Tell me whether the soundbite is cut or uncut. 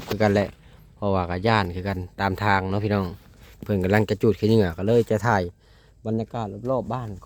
uncut